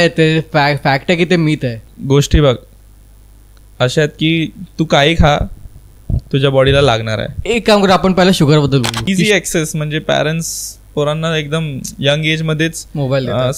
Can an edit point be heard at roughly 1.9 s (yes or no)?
yes